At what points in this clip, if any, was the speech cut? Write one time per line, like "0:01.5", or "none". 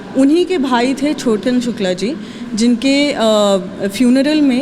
none